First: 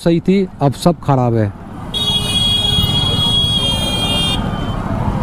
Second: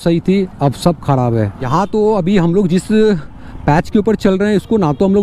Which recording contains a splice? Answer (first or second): second